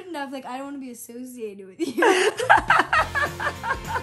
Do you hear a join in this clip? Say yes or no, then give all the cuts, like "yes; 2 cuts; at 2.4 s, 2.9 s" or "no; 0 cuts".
no; 0 cuts